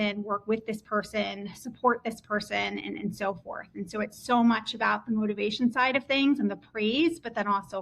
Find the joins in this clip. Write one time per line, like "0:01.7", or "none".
none